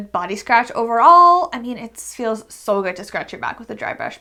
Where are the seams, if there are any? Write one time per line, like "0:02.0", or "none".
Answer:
none